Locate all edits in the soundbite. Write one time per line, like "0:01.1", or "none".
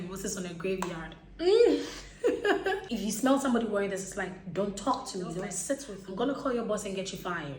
0:02.8
0:06.0